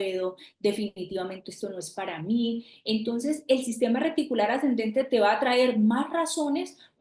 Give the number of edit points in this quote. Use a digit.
0